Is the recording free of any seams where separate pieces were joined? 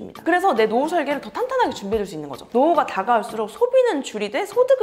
no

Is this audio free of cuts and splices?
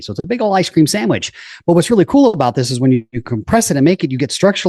yes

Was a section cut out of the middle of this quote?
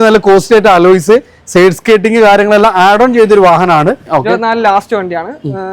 yes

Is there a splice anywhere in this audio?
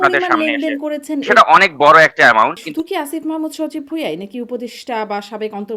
yes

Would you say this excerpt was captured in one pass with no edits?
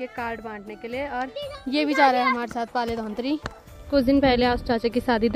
yes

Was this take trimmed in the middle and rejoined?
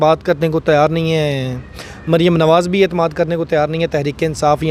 no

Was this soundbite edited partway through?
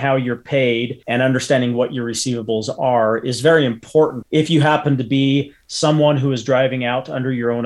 yes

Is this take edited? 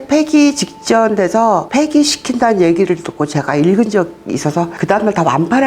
yes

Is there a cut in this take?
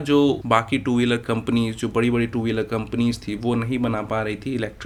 no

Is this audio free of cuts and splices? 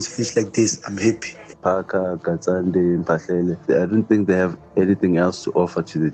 no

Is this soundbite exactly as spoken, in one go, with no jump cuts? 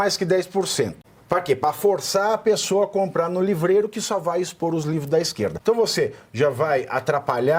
no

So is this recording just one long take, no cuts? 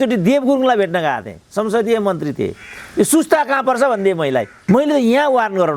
no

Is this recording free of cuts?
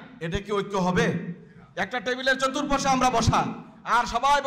yes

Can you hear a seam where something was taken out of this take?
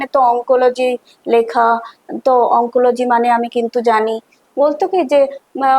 yes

